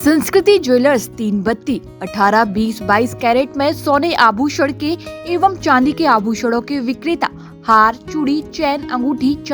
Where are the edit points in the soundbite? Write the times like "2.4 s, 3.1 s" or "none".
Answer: none